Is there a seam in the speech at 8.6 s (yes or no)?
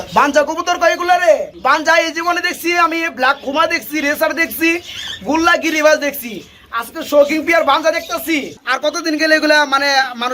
yes